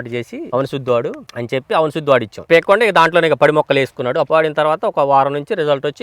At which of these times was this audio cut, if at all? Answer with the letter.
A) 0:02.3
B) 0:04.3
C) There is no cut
B